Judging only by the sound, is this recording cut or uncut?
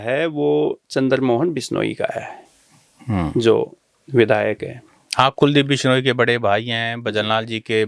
uncut